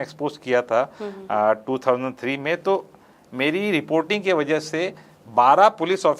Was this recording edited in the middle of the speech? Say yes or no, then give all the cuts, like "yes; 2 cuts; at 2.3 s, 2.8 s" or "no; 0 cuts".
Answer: no; 0 cuts